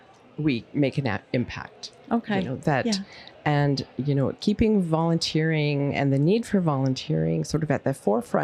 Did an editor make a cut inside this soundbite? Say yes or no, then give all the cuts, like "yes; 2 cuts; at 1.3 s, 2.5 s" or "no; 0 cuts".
no; 0 cuts